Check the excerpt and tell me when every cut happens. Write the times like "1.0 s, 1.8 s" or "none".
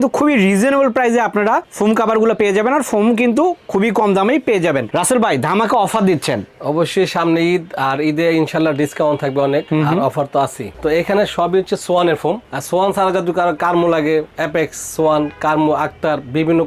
4.9 s, 10.7 s